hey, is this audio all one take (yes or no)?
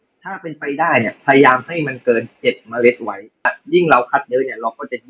no